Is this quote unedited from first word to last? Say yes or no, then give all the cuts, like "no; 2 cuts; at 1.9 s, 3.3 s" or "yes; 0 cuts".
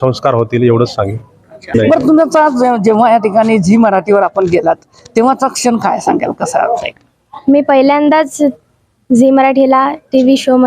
no; 1 cut; at 1.7 s